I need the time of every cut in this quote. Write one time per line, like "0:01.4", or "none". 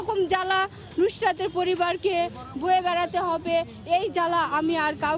none